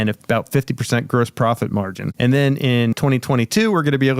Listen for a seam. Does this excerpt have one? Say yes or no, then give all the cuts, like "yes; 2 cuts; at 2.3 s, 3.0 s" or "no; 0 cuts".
yes; 2 cuts; at 2.0 s, 2.9 s